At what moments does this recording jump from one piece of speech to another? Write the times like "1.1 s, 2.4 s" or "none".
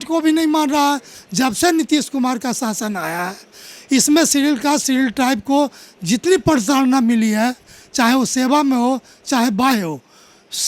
1.2 s

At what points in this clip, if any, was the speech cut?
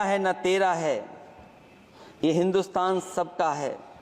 none

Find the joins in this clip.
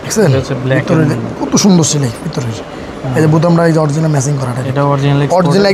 none

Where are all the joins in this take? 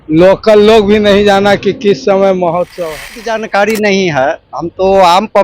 3.4 s

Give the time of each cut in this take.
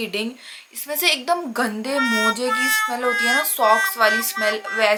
none

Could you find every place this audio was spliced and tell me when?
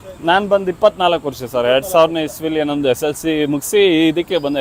none

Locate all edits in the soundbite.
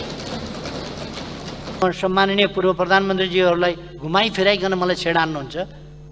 1.8 s

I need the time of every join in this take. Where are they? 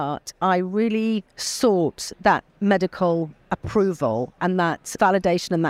1.4 s, 2.5 s, 4.6 s

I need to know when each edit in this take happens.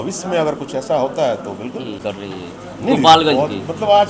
2.0 s

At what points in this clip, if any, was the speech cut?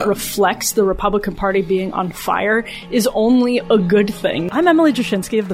4.4 s

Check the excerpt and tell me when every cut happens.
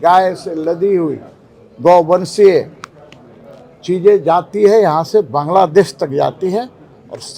none

